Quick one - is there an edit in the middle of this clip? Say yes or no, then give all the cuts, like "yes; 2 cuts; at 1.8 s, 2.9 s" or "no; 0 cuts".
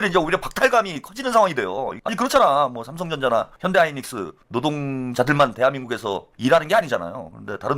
yes; 2 cuts; at 2.0 s, 3.5 s